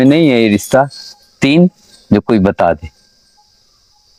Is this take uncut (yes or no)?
yes